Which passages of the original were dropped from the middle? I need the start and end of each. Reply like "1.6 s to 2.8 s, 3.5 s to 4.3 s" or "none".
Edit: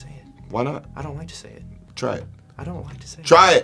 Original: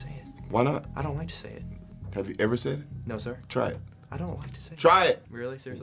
1.8 s to 3.4 s